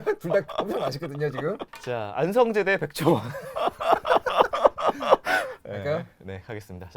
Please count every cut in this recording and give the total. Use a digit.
1